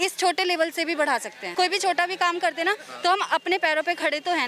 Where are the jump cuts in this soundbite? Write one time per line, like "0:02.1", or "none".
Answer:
0:01.4